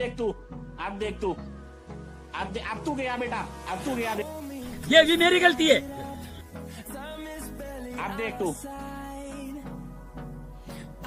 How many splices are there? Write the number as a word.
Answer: zero